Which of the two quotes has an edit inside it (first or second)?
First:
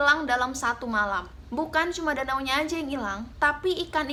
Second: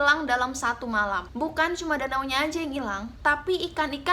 second